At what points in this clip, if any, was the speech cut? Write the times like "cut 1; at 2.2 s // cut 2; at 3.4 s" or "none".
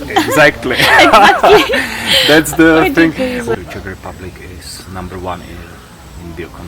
cut 1; at 3.5 s